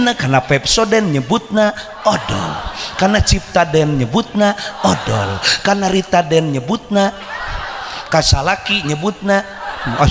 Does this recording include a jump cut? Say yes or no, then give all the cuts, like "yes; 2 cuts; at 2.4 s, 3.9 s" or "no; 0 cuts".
no; 0 cuts